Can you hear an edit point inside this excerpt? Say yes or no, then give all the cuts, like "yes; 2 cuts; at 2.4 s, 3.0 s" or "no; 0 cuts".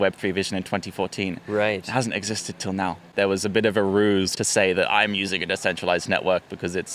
yes; 2 cuts; at 3.0 s, 4.3 s